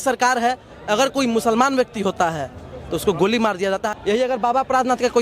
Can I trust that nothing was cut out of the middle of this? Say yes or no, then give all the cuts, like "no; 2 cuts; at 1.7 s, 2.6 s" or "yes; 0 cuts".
no; 1 cut; at 3.9 s